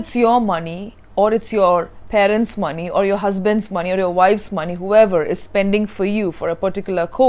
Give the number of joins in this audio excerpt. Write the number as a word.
zero